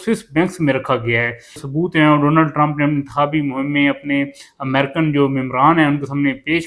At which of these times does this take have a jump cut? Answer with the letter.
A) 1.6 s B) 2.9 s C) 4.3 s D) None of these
A